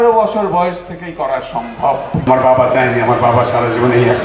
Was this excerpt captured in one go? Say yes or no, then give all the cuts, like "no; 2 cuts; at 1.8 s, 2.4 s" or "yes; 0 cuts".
no; 1 cut; at 2.3 s